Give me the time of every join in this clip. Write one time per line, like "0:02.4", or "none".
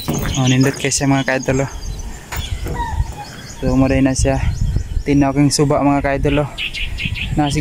0:02.4

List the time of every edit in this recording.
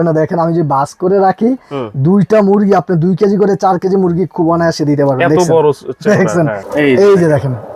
0:06.6

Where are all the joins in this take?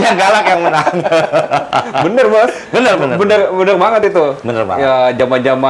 none

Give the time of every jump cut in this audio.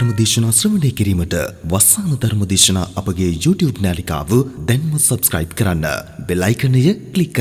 none

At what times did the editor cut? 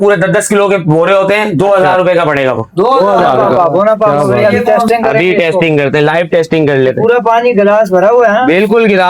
0:03.3

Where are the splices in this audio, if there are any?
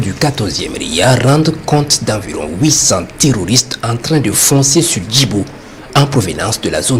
none

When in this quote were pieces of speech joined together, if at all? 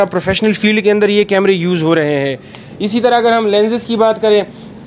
none

